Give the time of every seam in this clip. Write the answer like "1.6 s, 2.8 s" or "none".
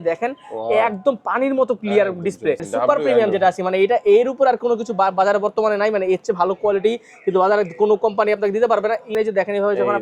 2.7 s, 9.1 s

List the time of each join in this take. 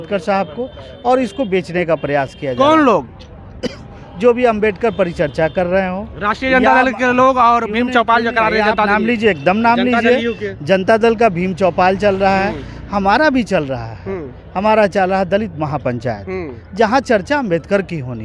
none

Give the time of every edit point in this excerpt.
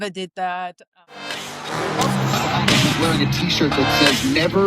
1.3 s

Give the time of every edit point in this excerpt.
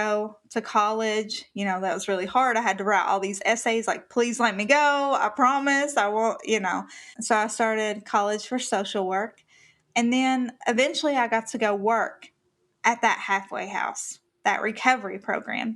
10.6 s

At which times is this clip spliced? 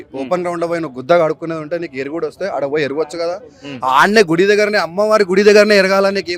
none

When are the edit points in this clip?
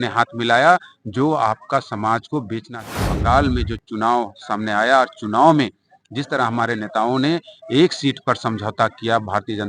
3.0 s

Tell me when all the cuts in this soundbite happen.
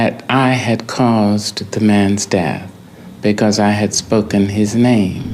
none

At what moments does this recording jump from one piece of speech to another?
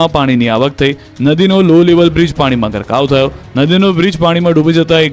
1.1 s

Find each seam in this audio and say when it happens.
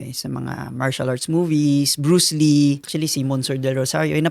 2.8 s

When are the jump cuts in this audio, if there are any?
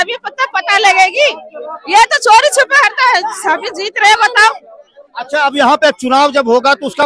none

